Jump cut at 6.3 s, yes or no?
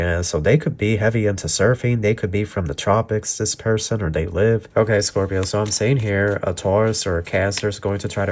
no